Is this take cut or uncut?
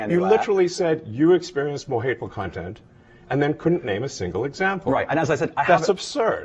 uncut